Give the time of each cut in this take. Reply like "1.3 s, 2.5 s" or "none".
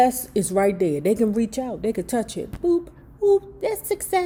none